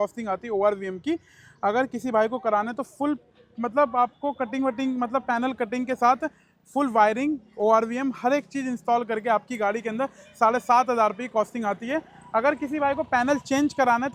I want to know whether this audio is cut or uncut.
uncut